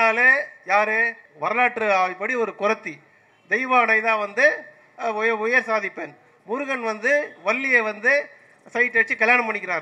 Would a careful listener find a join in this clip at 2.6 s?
no; 1 cut; at 1.2 s

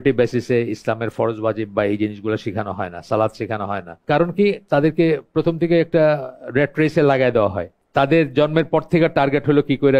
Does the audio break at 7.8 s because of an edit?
yes; 2 cuts; at 3.9 s, 7.8 s

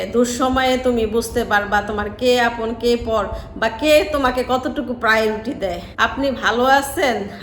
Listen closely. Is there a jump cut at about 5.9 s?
yes; 1 cut; at 5.9 s

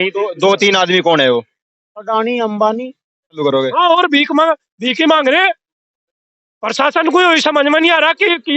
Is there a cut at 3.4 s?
yes; 1 cut; at 3.4 s

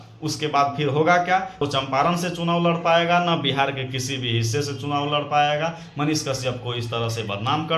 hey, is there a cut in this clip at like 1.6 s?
yes; 1 cut; at 1.6 s

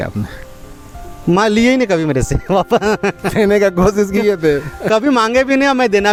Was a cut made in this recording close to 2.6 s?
no; 0 cuts

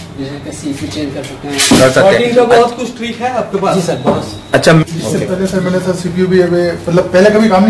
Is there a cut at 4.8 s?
yes; 1 cut; at 4.8 s

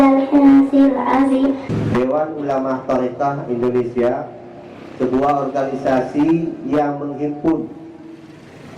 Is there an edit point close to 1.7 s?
no; 0 cuts

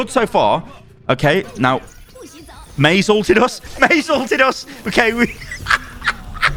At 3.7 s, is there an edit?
no; 0 cuts

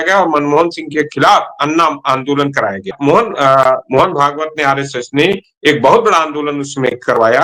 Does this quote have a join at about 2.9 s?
yes; 1 cut; at 2.9 s

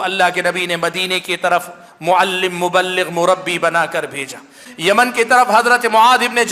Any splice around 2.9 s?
no; 1 cut; at 4.6 s

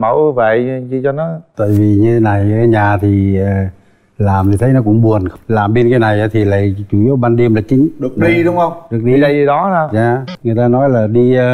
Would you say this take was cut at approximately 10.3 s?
yes; 1 cut; at 10.3 s

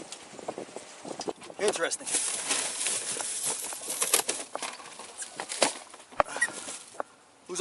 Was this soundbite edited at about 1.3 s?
yes; 1 cut; at 1.3 s

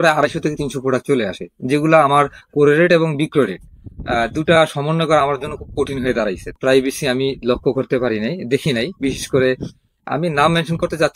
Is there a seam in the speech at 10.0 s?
no; 1 cut; at 6.6 s

